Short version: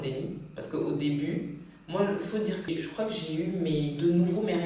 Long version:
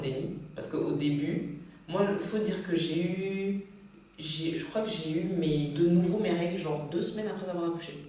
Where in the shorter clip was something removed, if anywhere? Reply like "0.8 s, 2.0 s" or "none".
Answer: 2.6 s